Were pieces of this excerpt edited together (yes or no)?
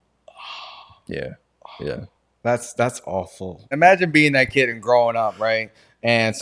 yes